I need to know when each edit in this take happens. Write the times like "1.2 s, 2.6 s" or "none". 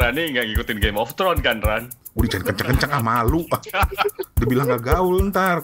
2.0 s